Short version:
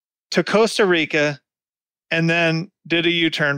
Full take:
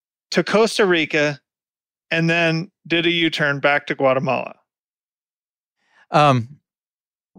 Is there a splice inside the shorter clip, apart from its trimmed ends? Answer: no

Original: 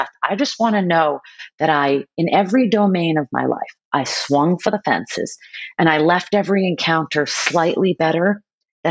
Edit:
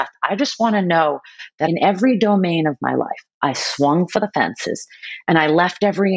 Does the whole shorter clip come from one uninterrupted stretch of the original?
no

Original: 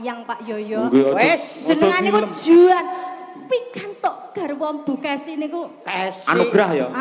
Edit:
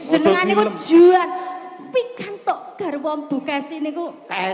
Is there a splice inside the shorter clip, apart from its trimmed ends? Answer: no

